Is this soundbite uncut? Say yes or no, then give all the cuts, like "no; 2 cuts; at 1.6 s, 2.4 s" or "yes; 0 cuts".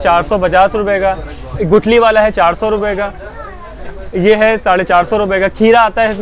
yes; 0 cuts